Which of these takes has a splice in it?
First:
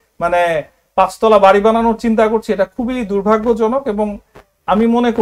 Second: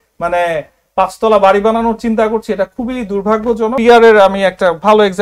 second; 1 cut; at 3.8 s

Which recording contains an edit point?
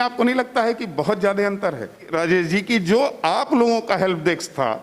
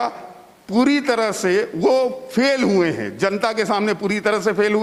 first; 1 cut; at 2.1 s

